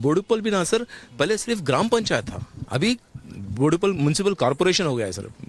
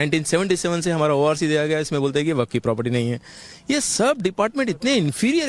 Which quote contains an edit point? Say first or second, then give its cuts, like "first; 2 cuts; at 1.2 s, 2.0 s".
first; 1 cut; at 2.1 s